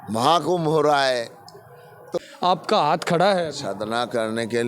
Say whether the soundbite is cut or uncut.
cut